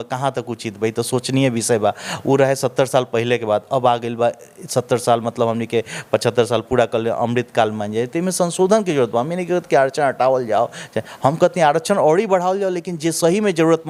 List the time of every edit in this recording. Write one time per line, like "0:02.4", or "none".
none